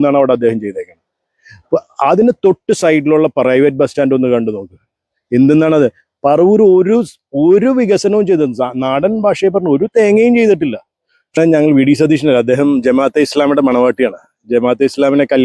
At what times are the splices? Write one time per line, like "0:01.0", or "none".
0:11.4